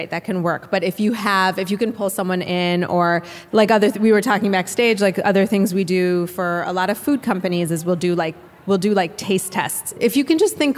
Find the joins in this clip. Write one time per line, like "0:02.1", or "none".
0:03.4
0:09.9